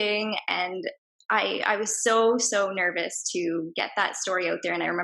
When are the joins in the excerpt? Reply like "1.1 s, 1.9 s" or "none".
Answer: none